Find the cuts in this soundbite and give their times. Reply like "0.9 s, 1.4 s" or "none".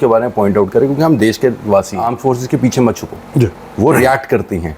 2.1 s